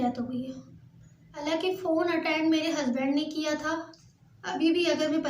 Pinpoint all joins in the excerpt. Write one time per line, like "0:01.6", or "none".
0:01.4
0:04.0